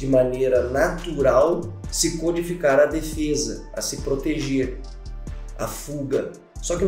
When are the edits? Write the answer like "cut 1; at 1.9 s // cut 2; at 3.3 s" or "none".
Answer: none

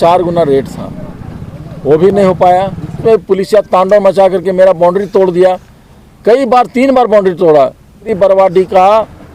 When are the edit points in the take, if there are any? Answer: cut 1; at 3.0 s // cut 2; at 8.1 s

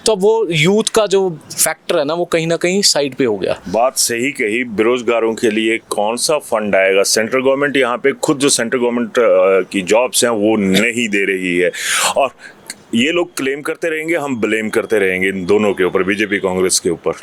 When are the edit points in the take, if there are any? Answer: none

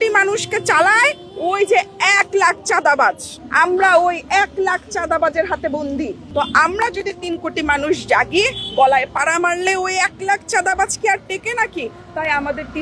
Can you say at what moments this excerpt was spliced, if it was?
none

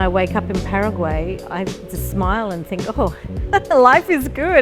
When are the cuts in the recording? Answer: cut 1; at 3.4 s

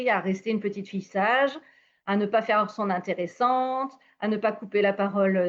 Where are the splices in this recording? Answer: none

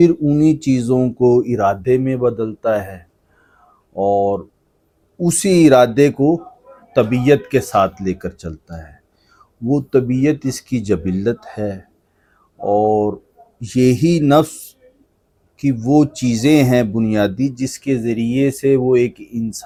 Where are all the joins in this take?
none

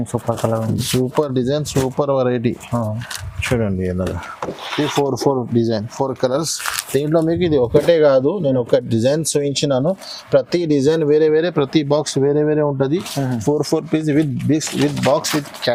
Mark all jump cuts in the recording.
none

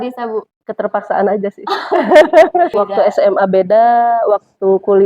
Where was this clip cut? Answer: cut 1; at 2.7 s

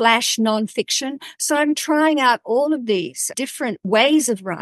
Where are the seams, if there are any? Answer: cut 1; at 3.4 s

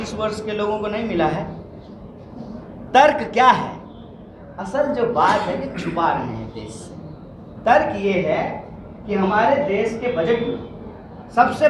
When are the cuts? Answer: none

